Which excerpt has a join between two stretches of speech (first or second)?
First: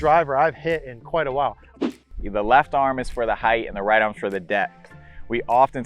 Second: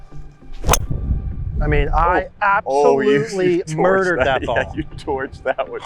first